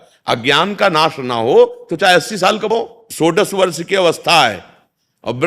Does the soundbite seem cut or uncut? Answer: cut